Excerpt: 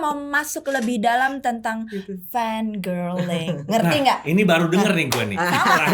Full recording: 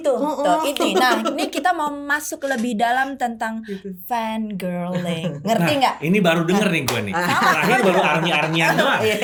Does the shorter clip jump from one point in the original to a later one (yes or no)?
no